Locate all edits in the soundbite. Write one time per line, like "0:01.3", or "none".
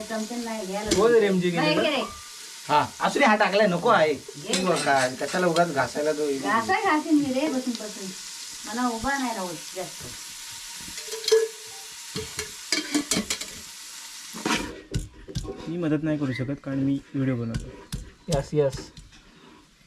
0:14.7